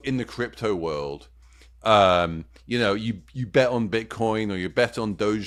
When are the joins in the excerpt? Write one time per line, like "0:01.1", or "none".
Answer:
none